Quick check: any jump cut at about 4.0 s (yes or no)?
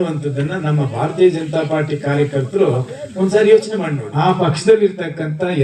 yes